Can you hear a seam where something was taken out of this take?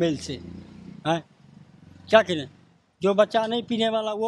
no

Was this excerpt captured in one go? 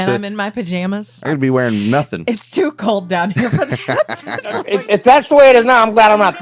no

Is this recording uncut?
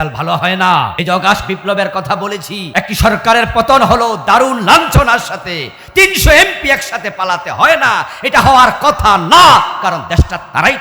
no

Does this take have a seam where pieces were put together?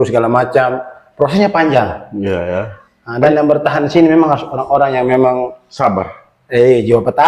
no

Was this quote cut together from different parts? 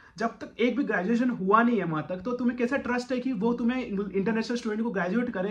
no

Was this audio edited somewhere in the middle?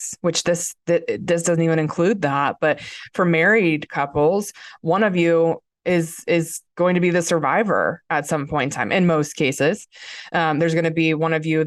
no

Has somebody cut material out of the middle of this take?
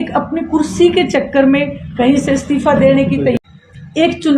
yes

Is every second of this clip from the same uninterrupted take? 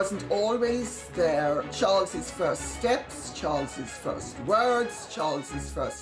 no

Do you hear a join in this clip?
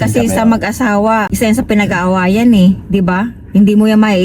no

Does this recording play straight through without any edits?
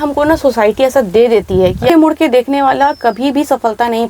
no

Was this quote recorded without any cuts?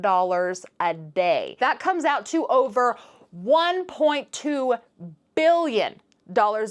no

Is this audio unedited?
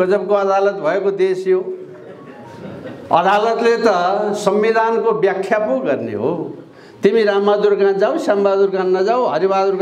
yes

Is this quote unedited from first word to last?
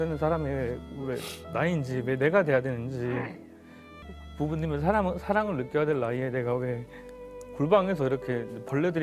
no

